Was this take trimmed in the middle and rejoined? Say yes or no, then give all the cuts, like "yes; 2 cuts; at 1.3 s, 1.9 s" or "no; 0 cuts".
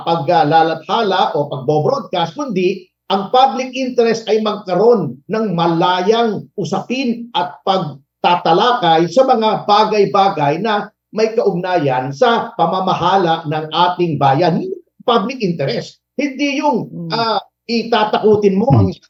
no; 0 cuts